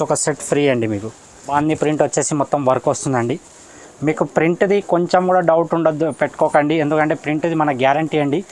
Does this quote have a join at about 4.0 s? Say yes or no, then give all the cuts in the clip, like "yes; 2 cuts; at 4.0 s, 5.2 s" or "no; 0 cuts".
no; 1 cut; at 1.5 s